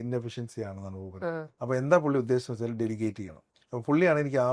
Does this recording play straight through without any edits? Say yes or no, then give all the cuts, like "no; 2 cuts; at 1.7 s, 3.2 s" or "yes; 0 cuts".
no; 1 cut; at 1.5 s